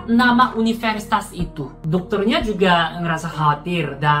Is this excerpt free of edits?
no; 1 cut; at 1.7 s

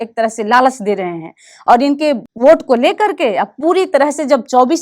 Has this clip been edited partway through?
yes; 1 cut; at 2.3 s

